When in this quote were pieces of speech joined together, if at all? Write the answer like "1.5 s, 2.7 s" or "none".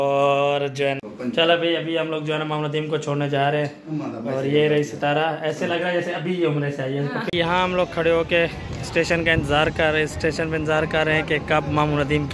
1.0 s, 7.2 s